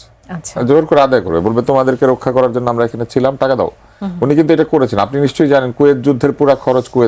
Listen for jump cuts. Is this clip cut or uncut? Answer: uncut